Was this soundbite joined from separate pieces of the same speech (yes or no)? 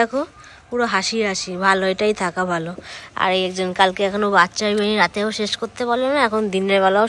no